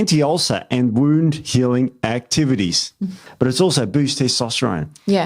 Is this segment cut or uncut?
cut